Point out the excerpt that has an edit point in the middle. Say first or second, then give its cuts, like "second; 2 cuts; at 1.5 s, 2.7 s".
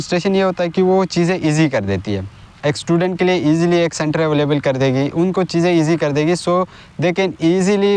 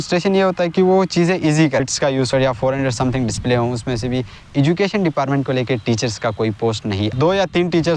second; 2 cuts; at 2.3 s, 6.9 s